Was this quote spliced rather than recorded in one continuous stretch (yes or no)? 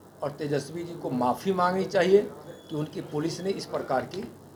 no